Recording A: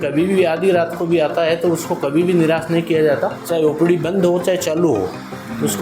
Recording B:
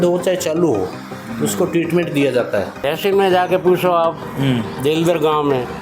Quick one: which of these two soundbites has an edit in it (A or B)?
B